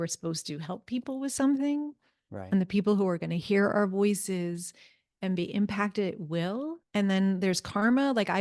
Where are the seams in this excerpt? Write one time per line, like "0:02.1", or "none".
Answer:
0:06.8